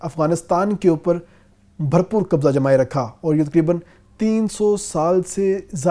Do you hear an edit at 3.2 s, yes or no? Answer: no